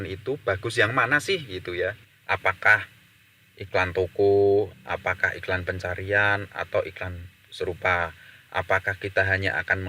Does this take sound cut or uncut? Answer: cut